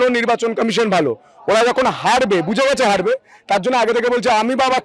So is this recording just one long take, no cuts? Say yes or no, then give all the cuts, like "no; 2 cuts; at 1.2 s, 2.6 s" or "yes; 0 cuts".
yes; 0 cuts